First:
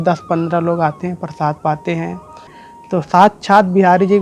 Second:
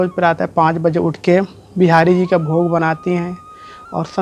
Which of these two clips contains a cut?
first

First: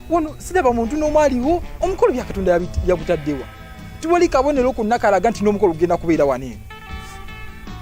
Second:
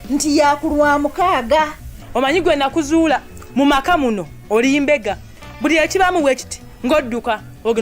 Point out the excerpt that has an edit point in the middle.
second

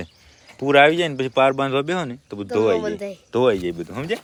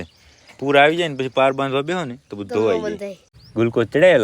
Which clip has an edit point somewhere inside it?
second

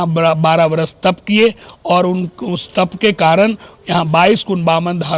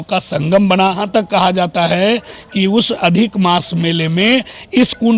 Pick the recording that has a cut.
second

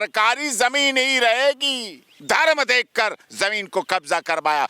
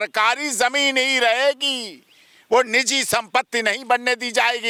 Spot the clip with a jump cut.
first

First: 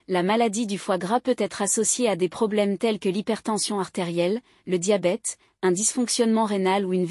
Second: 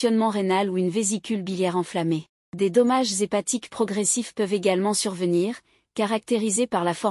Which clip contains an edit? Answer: second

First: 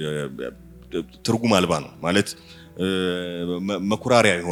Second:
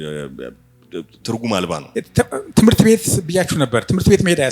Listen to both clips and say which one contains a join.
second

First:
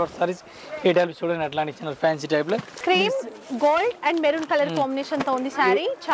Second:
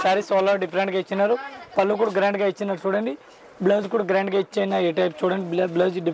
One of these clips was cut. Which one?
first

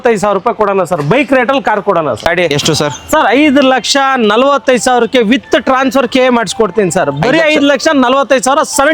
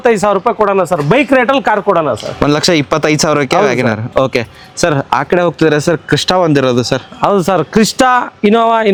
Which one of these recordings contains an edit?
first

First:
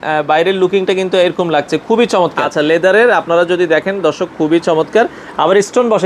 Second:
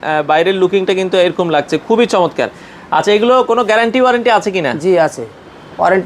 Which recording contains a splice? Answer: first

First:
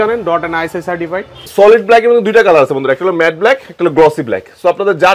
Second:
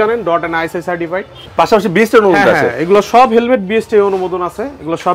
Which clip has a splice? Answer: first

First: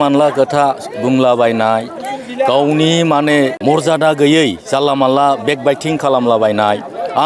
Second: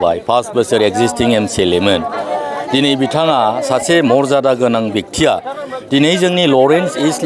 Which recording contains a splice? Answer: first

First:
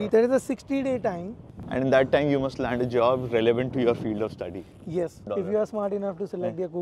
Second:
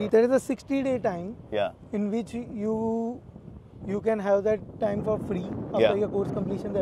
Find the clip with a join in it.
first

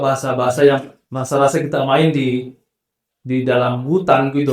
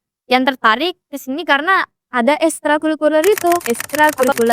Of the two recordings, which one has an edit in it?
second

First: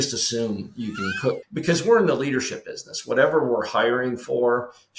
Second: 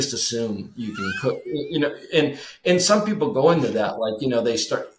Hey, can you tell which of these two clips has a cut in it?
first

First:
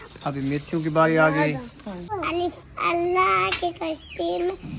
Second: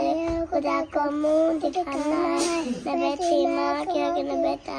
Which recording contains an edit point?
first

